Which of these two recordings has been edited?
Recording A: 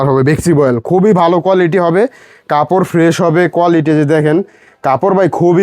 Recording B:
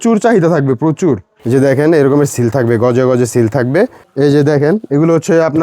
B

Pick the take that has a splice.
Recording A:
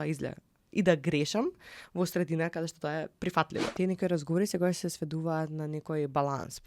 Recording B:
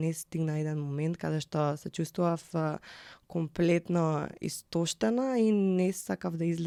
A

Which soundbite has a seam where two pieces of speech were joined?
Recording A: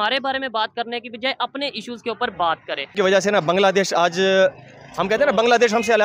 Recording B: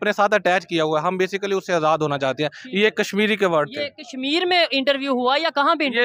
A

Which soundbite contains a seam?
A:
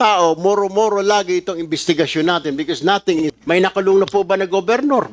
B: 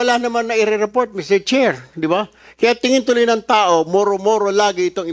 A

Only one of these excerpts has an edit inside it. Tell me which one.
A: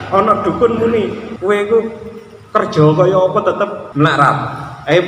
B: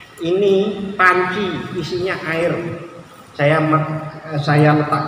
A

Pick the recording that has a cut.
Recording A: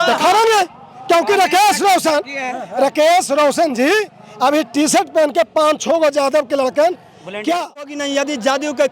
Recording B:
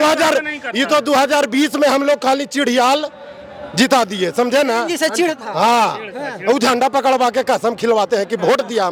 A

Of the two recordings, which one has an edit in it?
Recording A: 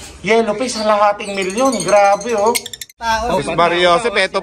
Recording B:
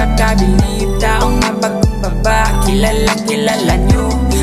A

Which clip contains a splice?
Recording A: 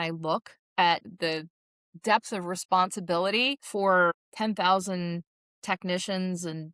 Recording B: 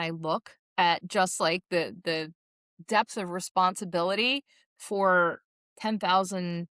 A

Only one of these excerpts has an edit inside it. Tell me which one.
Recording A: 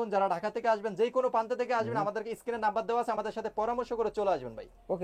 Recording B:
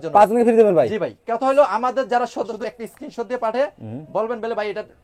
B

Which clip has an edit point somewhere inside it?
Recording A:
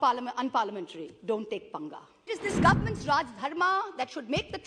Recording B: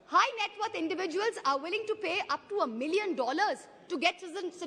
A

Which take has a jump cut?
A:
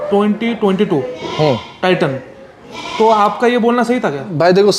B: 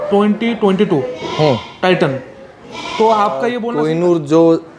B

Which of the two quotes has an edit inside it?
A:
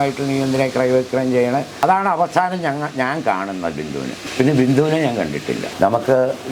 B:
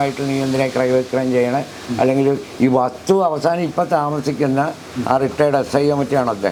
A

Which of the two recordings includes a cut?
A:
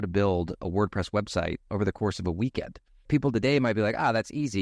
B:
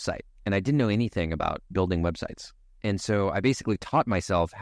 A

